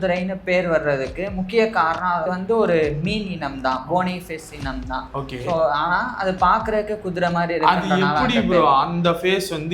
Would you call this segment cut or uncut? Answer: cut